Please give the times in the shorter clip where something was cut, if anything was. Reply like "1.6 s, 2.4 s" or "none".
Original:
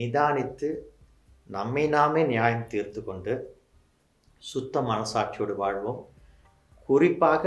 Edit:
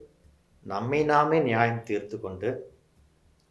none